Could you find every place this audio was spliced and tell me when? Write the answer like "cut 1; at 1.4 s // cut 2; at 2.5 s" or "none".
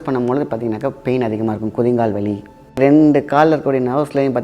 cut 1; at 2.8 s